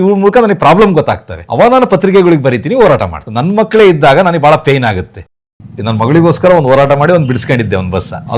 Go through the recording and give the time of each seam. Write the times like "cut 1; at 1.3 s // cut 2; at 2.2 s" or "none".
cut 1; at 5.2 s